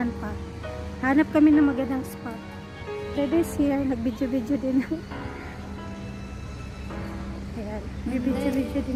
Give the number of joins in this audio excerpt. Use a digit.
0